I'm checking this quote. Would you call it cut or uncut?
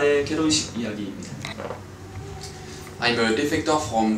cut